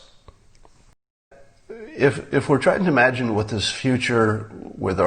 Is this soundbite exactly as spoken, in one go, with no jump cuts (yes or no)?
no